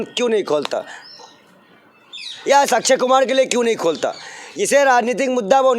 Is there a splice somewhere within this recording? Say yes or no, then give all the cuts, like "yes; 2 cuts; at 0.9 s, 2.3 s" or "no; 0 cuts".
no; 0 cuts